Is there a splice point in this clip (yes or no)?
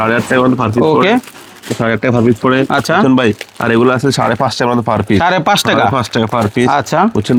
no